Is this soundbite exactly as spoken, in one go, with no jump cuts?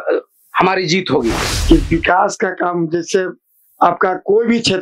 no; 1 cut; at 1.5 s

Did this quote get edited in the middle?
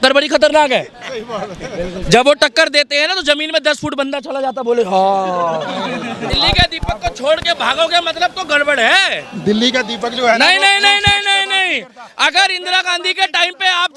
yes; 1 cut; at 6.3 s

